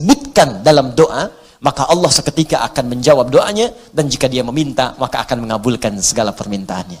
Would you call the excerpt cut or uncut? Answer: uncut